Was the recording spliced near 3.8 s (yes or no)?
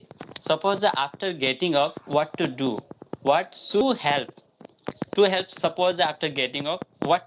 yes